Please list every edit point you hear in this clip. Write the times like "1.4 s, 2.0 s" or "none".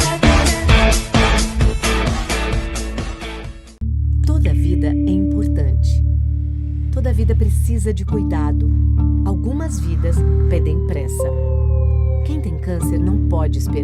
3.6 s